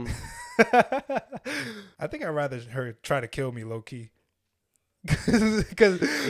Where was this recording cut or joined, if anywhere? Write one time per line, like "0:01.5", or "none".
0:01.8